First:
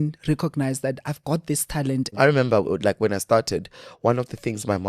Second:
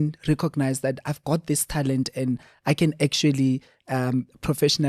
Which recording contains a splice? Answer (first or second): first